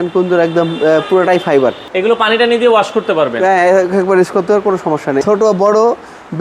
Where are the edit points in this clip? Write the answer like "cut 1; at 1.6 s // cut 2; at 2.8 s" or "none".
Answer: cut 1; at 1.9 s // cut 2; at 5.2 s